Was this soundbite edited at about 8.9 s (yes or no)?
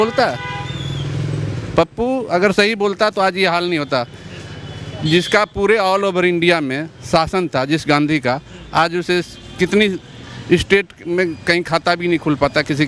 no